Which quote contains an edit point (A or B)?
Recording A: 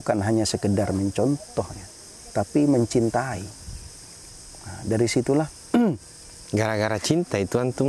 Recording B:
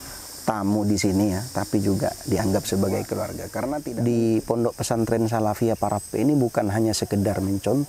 B